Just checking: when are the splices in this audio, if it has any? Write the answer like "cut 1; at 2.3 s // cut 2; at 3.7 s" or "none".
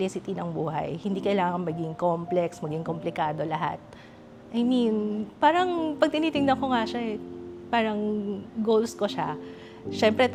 none